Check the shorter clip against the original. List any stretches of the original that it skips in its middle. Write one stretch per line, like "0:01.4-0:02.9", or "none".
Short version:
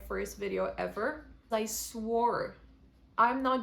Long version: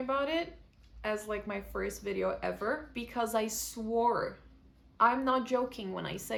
0:03.1-0:03.3

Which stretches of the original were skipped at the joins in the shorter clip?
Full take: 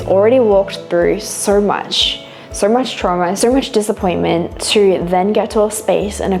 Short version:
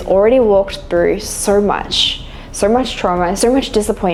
none

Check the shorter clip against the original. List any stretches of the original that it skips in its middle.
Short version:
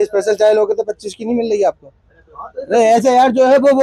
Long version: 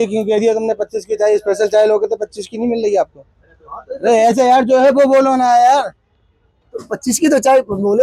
none

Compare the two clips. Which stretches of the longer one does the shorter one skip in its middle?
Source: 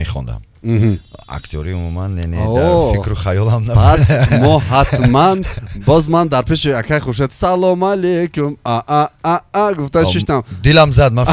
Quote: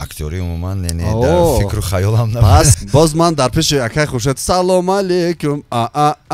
0:04.1-0:05.7

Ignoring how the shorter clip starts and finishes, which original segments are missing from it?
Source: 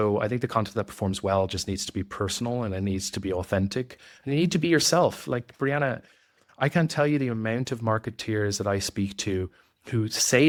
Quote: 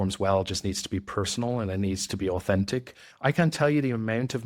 0:04.0-0:06.4

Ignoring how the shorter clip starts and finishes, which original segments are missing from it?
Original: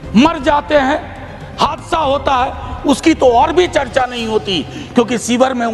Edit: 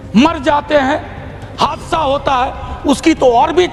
none

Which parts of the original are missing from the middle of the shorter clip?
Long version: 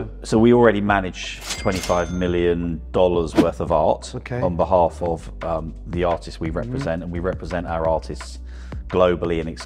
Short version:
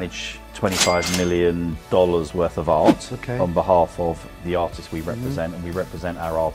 0:05.3-0:05.8

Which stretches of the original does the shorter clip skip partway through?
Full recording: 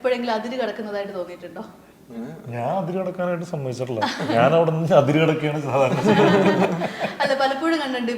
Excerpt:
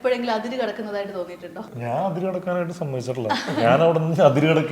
0:01.7-0:02.4

